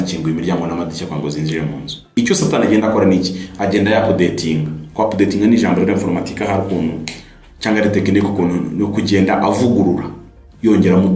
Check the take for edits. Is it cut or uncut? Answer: cut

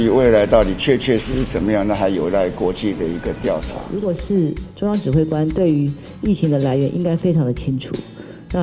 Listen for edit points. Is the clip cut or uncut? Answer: cut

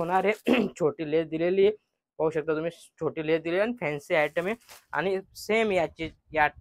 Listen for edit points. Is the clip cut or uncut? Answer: uncut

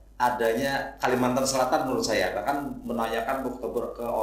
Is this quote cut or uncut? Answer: uncut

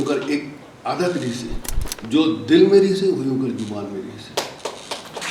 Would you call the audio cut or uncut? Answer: uncut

